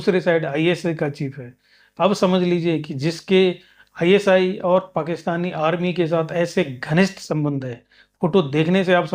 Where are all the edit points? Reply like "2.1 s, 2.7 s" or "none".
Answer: none